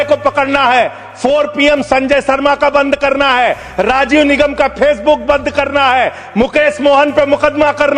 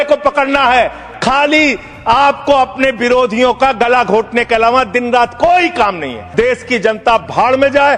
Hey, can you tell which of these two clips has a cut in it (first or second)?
second